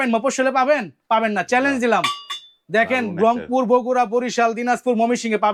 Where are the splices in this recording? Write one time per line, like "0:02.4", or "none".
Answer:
none

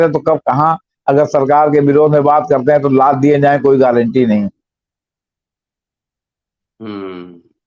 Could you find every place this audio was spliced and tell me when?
none

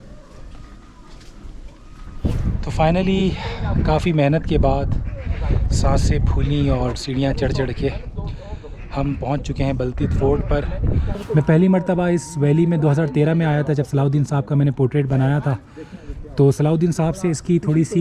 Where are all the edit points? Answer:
0:02.2
0:11.1

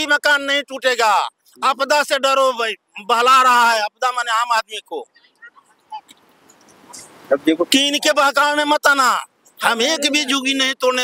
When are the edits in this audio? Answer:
none

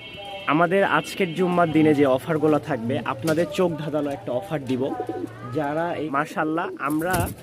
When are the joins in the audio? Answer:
0:06.1

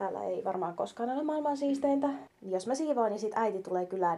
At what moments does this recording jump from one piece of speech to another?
0:02.3

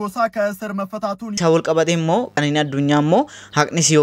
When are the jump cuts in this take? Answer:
0:01.4
0:02.4

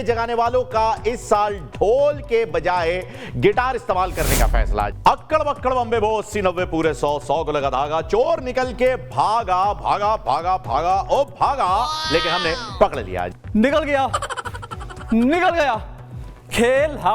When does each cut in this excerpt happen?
0:04.9
0:13.3

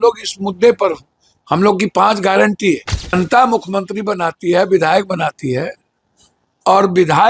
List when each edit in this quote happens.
0:03.1

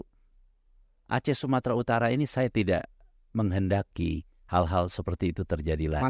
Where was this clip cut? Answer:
none

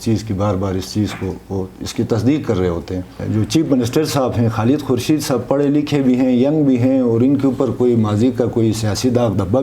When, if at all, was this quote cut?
0:03.2

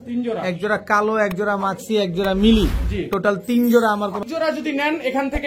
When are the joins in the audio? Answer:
0:04.2

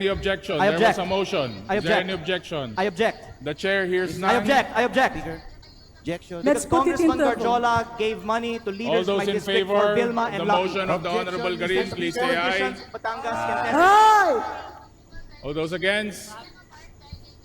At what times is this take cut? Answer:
0:16.5

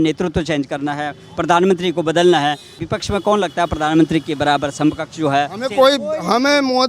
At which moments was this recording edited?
0:02.8

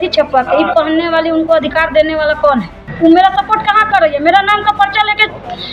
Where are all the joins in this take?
0:02.9

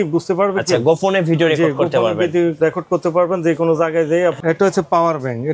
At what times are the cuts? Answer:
0:04.4

